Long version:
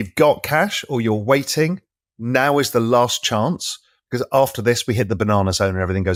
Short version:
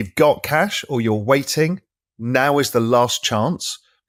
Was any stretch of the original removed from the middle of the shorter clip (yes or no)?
no